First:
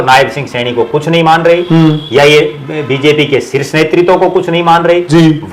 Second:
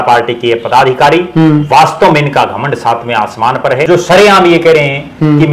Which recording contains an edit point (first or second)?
second